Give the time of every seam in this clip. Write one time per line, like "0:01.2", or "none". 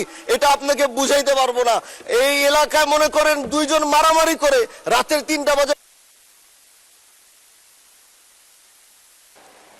none